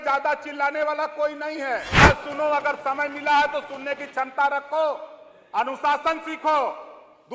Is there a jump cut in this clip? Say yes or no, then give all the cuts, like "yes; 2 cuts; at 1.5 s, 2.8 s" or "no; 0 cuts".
yes; 1 cut; at 2.0 s